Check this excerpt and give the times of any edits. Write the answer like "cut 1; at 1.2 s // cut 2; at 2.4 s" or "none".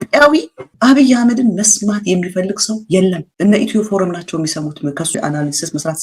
none